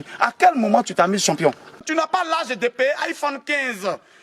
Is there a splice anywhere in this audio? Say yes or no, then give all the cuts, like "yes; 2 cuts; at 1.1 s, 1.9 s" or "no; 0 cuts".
yes; 1 cut; at 1.8 s